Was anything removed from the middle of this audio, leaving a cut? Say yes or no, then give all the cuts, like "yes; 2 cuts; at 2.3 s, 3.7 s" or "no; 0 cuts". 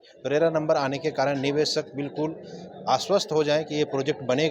no; 0 cuts